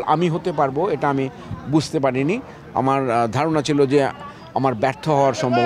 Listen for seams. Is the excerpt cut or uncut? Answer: uncut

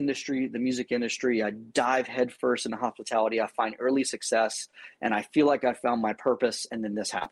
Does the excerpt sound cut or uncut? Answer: uncut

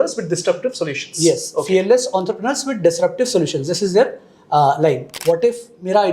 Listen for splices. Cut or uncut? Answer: cut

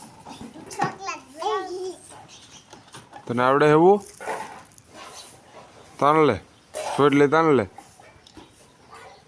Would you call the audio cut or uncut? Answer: uncut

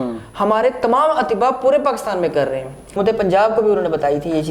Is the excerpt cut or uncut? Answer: cut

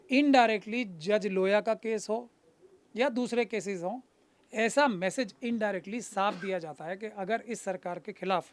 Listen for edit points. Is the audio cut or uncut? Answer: uncut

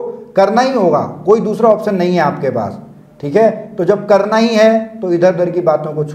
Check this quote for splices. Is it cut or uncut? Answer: uncut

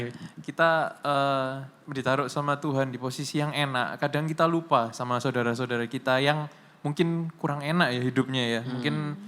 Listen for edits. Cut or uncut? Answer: uncut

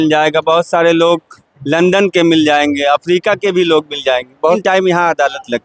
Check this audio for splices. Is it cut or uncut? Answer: cut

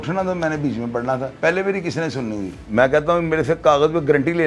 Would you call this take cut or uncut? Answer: cut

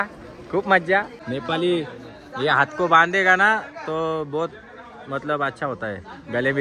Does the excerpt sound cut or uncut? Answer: cut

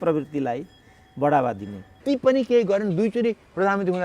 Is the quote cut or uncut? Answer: cut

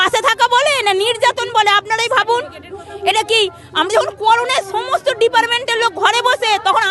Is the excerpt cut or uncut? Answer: uncut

